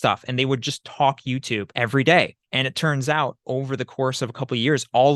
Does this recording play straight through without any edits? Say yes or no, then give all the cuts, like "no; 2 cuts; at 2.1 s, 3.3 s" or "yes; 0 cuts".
no; 2 cuts; at 1.7 s, 2.4 s